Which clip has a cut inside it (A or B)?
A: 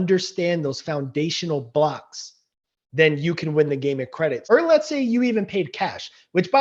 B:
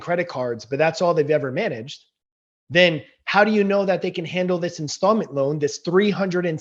A